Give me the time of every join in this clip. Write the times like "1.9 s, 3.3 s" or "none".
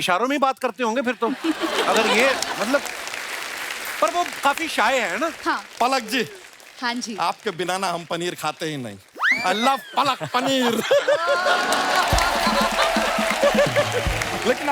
5.7 s